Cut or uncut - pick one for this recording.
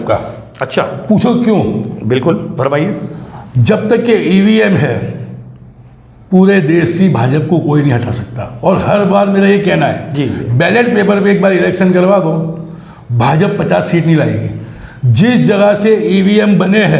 uncut